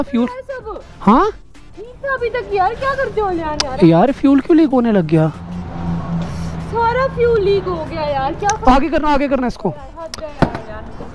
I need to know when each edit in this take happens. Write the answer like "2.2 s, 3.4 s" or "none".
none